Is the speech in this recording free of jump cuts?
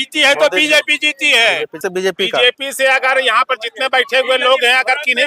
no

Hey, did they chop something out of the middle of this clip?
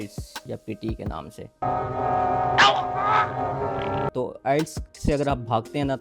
yes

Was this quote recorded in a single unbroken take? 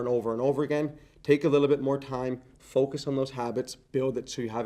yes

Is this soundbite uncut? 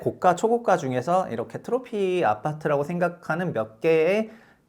yes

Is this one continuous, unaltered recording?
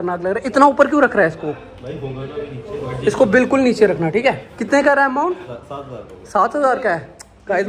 yes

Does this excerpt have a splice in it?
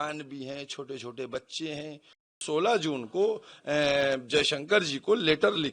yes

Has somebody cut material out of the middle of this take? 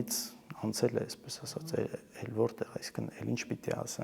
no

